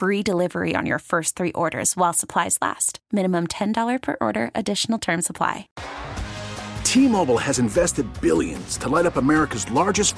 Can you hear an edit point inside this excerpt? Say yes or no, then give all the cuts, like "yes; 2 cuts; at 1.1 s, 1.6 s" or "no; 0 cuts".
yes; 1 cut; at 5.7 s